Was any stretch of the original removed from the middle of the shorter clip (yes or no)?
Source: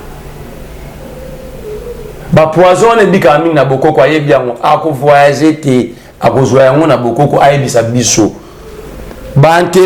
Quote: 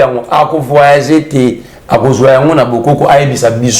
no